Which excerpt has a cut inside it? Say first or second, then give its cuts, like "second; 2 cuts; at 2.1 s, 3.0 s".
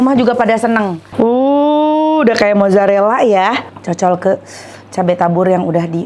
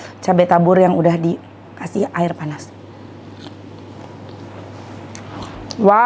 first; 2 cuts; at 1.0 s, 3.7 s